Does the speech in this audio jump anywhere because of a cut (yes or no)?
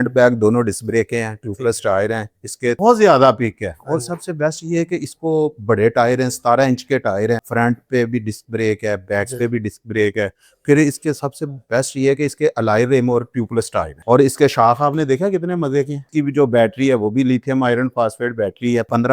yes